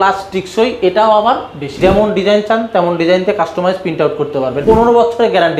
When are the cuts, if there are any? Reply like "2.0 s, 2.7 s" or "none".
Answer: 1.6 s, 4.6 s